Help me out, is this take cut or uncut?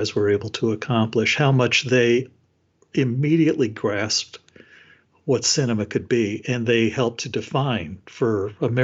uncut